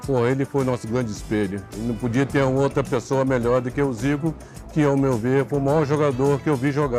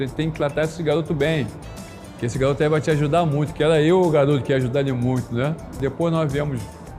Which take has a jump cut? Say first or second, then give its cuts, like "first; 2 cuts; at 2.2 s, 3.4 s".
second; 1 cut; at 5.8 s